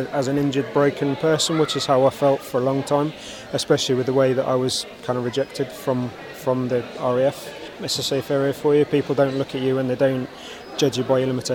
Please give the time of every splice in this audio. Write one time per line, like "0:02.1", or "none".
0:07.8